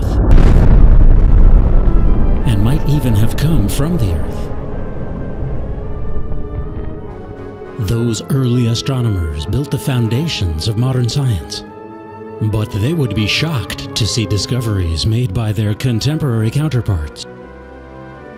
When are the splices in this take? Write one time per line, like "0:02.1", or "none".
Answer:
none